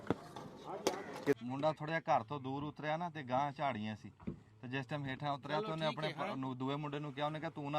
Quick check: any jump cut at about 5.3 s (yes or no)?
no